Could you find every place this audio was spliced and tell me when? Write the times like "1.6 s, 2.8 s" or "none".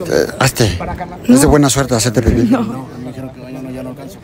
none